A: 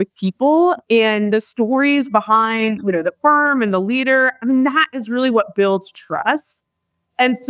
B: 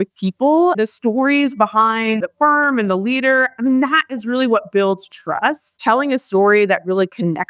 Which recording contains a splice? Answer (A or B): B